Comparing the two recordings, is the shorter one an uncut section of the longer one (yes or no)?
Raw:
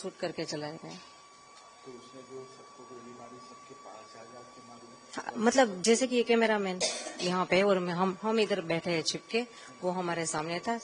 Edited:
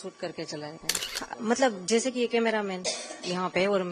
no